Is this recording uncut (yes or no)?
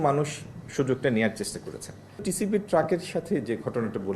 no